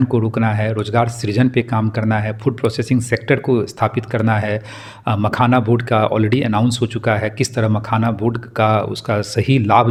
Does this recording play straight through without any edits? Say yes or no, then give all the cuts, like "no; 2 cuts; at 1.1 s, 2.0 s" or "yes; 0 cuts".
yes; 0 cuts